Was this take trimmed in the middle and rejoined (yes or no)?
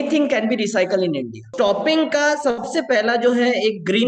yes